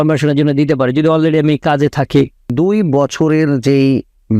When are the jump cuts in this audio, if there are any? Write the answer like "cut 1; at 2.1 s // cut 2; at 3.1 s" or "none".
cut 1; at 2.5 s

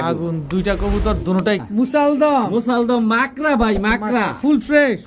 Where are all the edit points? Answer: cut 1; at 1.7 s

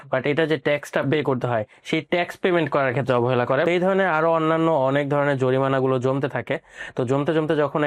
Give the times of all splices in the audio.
cut 1; at 3.6 s

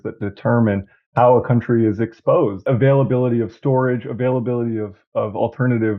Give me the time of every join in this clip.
cut 1; at 2.6 s

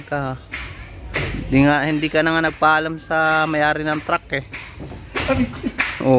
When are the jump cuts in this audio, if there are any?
none

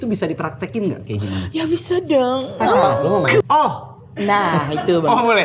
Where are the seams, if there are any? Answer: cut 1; at 3.4 s

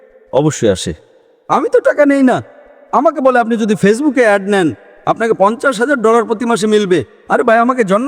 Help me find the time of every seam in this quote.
none

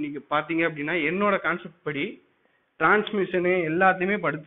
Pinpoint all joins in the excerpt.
none

